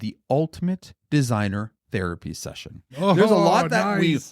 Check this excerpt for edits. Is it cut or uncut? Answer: cut